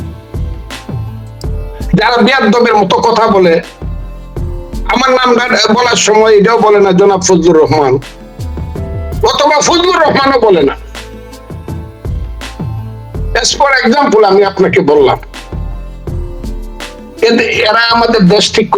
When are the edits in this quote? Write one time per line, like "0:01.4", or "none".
none